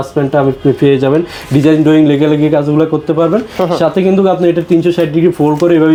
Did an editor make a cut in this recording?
no; 0 cuts

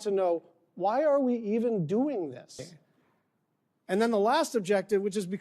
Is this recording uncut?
no; 1 cut; at 2.6 s

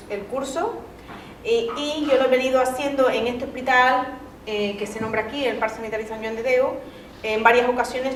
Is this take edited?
no; 0 cuts

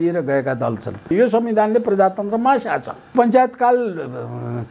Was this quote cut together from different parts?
yes; 2 cuts; at 1.1 s, 3.1 s

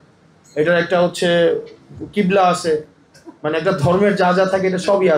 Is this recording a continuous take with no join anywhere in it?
yes; 0 cuts

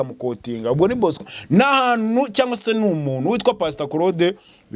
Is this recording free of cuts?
no; 1 cut; at 1.2 s

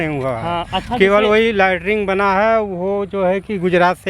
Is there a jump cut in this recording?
no; 0 cuts

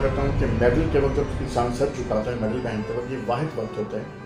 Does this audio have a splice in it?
no; 0 cuts

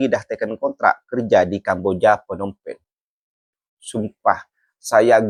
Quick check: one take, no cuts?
yes; 0 cuts

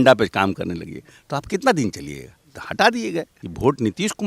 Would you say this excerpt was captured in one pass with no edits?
no; 1 cut; at 3.3 s

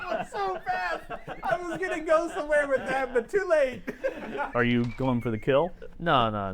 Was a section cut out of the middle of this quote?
yes; 1 cut; at 4.5 s

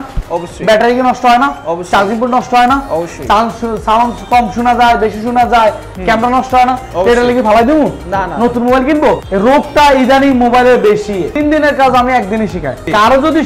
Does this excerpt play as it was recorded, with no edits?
no; 1 cut; at 11.3 s

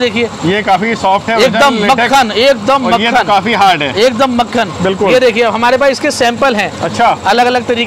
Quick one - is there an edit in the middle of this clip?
no; 0 cuts

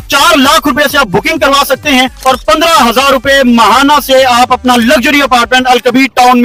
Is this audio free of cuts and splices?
yes; 0 cuts

